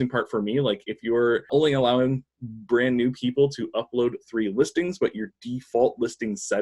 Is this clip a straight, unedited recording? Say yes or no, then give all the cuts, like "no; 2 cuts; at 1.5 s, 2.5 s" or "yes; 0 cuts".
no; 1 cut; at 1.5 s